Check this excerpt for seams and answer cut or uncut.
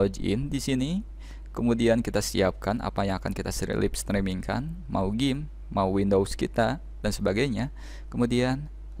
uncut